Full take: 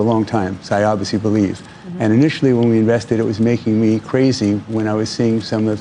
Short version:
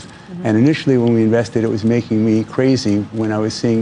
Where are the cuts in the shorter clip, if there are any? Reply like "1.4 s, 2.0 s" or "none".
none